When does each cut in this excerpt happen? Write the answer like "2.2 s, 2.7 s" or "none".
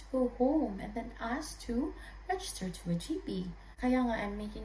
3.6 s